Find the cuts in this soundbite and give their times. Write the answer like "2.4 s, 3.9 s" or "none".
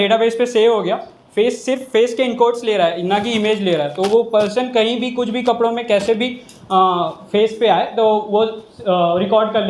none